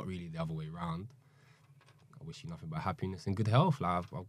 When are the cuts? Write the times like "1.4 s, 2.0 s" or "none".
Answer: none